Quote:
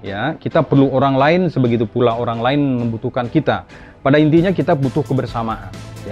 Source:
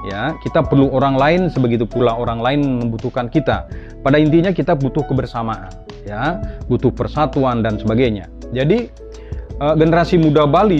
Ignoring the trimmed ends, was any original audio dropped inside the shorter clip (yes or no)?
no